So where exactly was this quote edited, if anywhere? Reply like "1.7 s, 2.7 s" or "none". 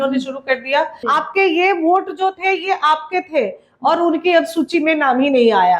1.0 s